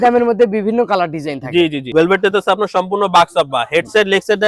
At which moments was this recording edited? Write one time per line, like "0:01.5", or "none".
0:01.9